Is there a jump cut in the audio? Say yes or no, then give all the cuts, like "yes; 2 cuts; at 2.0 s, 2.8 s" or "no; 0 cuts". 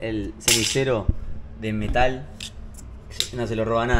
no; 0 cuts